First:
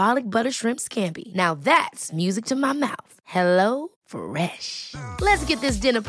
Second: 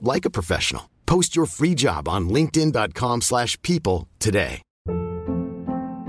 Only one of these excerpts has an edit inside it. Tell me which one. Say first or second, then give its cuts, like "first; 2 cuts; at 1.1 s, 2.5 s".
second; 1 cut; at 4.7 s